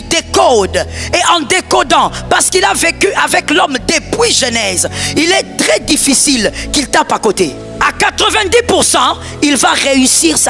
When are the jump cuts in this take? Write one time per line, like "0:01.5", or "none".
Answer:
0:07.7